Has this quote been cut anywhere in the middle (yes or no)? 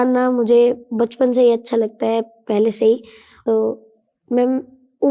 yes